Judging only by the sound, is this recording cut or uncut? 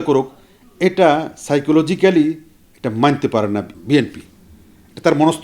cut